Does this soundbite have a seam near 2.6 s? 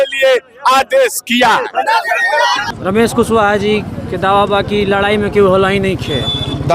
yes; 1 cut; at 2.6 s

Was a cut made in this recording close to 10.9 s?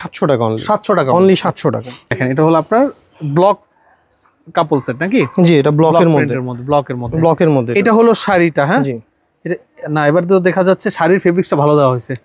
no; 1 cut; at 2.1 s

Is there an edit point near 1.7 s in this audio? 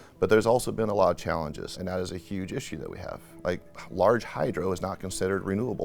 yes; 1 cut; at 1.7 s

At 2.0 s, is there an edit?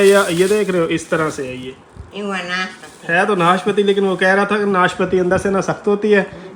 no; 0 cuts

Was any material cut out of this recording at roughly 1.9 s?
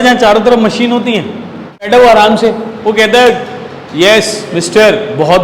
yes; 1 cut; at 1.9 s

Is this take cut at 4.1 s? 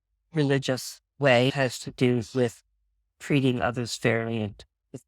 no; 1 cut; at 1.5 s

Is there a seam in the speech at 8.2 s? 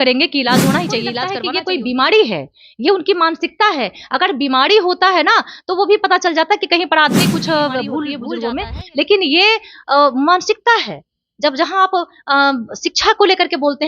yes; 2 cuts; at 1.3 s, 8.2 s

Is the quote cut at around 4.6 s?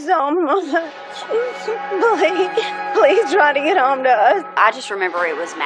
yes; 1 cut; at 4.6 s

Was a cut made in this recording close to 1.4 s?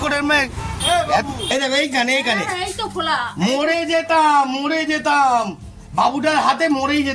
yes; 1 cut; at 1.4 s

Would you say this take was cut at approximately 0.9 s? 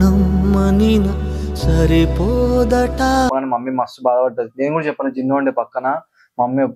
no; 1 cut; at 3.3 s

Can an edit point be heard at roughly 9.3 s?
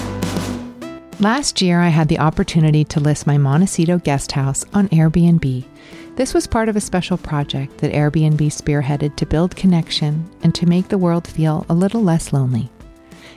no; 1 cut; at 1.0 s

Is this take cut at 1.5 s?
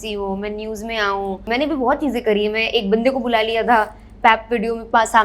yes; 1 cut; at 1.5 s

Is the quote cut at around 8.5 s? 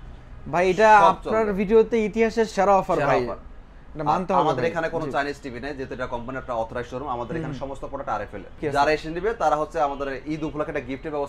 yes; 1 cut; at 8.5 s

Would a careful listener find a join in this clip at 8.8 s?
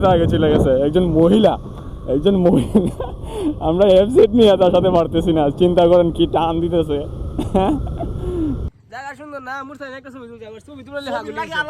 yes; 1 cut; at 8.8 s

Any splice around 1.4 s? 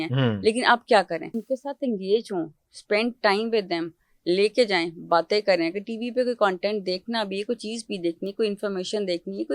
yes; 1 cut; at 1.4 s

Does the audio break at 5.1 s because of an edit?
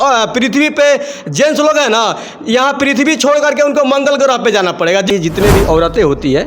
yes; 1 cut; at 5.1 s

